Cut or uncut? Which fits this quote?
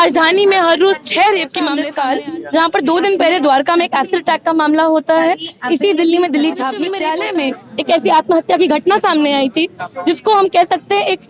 cut